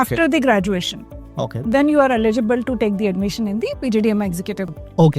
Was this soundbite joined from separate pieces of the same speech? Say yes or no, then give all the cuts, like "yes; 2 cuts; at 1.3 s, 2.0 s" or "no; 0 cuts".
no; 0 cuts